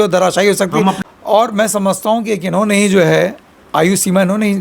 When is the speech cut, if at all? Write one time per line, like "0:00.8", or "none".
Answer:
0:01.0